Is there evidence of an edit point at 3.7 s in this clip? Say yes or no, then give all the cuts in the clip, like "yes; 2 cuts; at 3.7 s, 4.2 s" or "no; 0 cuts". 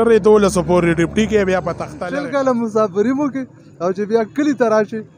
no; 1 cut; at 1.9 s